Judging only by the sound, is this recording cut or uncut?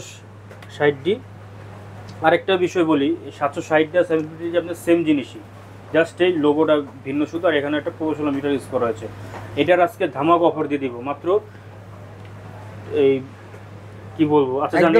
uncut